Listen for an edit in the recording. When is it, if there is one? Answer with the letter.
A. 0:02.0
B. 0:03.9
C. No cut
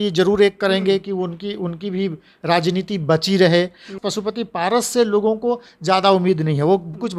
B